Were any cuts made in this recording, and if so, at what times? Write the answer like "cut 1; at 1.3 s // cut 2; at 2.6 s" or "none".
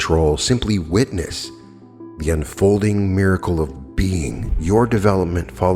cut 1; at 4.5 s